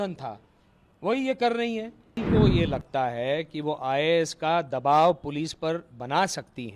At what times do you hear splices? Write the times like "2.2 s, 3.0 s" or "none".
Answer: 2.2 s